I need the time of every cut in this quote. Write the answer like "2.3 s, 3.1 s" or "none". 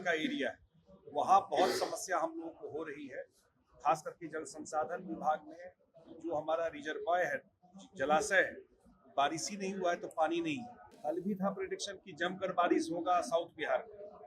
10.9 s